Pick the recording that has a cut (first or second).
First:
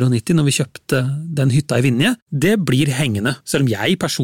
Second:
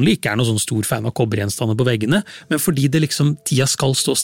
first